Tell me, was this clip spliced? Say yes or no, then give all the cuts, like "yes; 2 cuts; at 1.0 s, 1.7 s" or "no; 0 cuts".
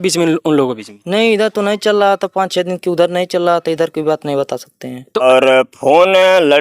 yes; 1 cut; at 5.2 s